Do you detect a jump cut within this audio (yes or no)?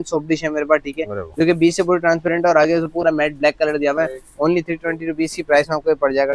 no